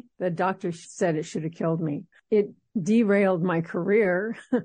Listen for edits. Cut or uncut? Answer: cut